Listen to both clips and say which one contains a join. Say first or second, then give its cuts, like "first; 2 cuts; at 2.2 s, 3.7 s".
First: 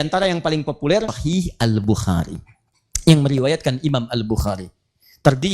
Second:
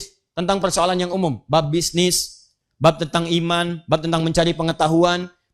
first; 1 cut; at 1.2 s